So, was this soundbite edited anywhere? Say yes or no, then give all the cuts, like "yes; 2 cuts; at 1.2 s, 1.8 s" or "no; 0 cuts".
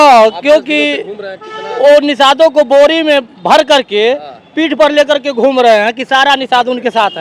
no; 0 cuts